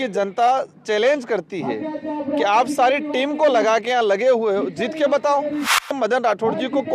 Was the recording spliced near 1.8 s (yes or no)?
no